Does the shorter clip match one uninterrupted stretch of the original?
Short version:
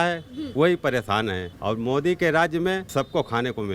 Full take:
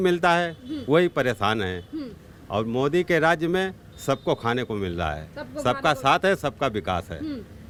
no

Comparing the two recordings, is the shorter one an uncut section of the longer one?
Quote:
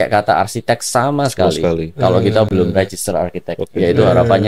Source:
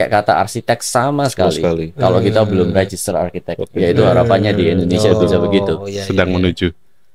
yes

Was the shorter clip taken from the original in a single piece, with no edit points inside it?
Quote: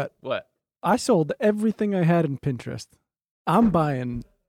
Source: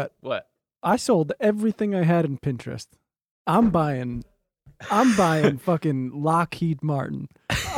yes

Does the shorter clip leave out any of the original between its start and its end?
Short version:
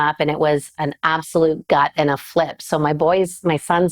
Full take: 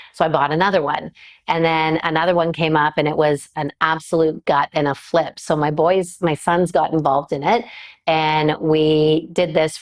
no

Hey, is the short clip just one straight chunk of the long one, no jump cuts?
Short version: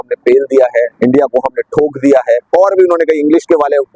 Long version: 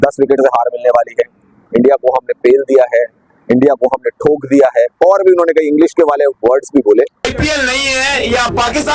no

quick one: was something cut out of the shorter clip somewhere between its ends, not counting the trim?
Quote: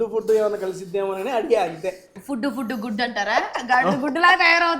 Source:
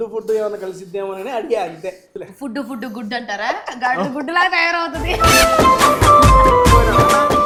yes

